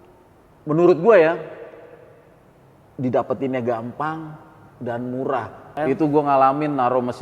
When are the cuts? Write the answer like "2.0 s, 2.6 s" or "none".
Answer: 5.7 s